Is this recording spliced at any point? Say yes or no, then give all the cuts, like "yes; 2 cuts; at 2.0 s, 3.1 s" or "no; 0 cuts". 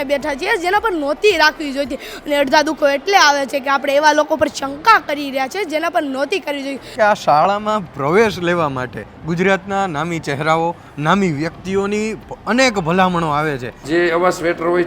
yes; 2 cuts; at 6.9 s, 13.7 s